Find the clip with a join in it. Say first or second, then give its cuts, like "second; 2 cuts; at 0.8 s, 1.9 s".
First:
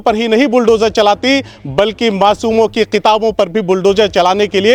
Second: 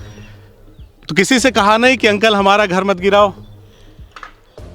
second; 2 cuts; at 1.0 s, 3.5 s